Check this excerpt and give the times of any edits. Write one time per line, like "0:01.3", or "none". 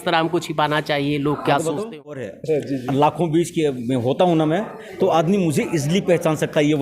0:02.3